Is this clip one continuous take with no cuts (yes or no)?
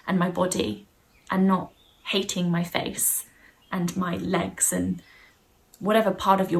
yes